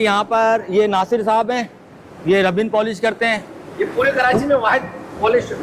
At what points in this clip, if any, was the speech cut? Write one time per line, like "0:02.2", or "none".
none